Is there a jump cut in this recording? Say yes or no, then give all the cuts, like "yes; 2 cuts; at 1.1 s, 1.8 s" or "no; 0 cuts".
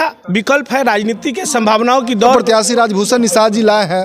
yes; 1 cut; at 2.3 s